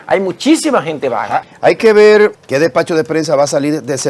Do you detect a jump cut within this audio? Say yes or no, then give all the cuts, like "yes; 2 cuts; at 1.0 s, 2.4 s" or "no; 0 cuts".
yes; 2 cuts; at 1.4 s, 2.3 s